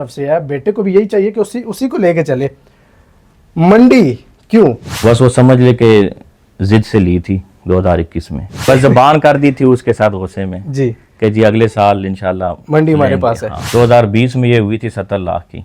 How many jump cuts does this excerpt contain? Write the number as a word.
three